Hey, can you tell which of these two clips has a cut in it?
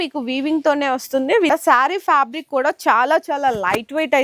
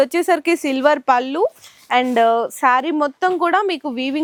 first; 1 cut; at 1.5 s

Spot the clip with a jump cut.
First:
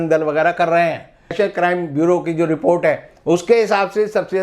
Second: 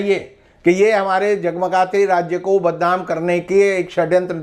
first; 1 cut; at 1.3 s

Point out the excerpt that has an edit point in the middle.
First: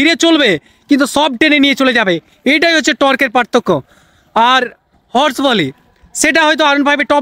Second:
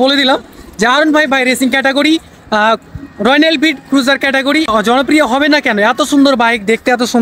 second; 1 cut; at 4.7 s

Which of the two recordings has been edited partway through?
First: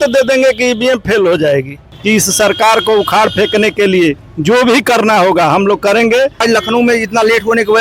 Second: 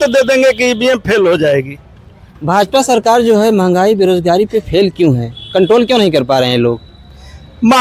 first; 3 cuts; at 1.9 s, 4.3 s, 6.4 s

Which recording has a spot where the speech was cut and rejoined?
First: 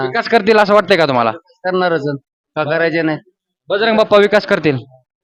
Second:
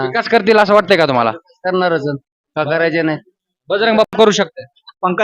second; 1 cut; at 4.1 s

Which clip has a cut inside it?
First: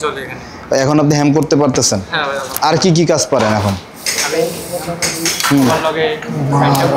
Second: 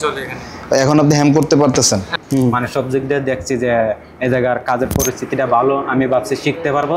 second; 1 cut; at 2.1 s

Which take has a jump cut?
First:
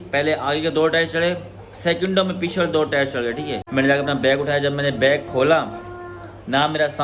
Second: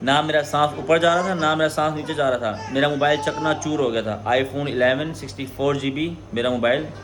first; 1 cut; at 3.6 s

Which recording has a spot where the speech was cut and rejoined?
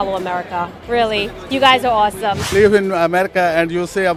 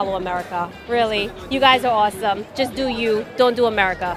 first; 1 cut; at 2.4 s

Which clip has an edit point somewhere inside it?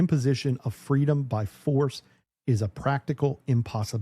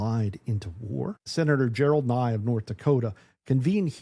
second; 1 cut; at 1.2 s

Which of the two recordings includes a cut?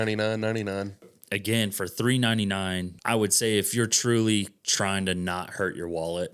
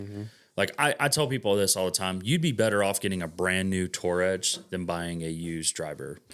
first; 2 cuts; at 1.1 s, 2.9 s

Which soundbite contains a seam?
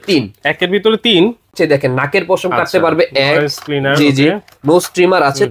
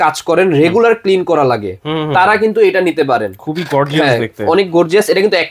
first; 1 cut; at 1.5 s

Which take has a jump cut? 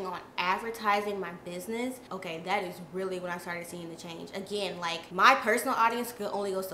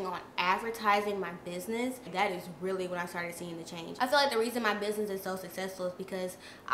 second; 2 cuts; at 2.0 s, 3.8 s

